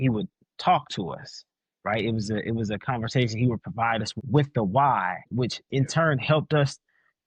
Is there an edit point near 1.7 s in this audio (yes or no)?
no